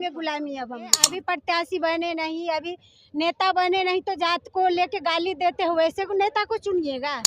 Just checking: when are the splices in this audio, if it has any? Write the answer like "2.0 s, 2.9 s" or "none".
1.1 s